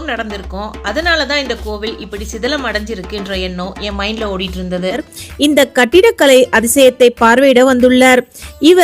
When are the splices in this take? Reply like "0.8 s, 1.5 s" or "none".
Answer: 5.1 s